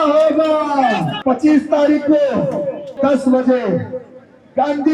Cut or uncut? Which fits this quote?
cut